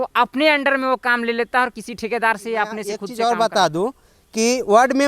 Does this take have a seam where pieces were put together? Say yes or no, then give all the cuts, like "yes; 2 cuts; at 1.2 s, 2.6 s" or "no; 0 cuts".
yes; 1 cut; at 3.1 s